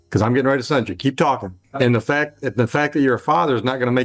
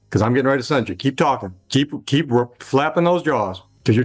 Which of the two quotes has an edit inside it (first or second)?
first